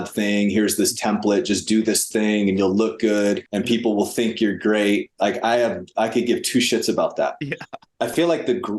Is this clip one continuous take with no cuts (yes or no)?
no